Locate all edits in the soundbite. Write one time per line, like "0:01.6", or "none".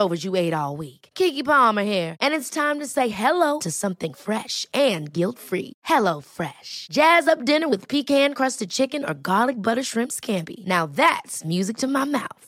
none